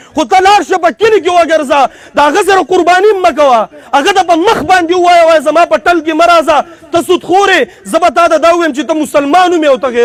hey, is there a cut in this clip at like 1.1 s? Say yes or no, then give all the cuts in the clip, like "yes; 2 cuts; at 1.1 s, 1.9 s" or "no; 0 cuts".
no; 0 cuts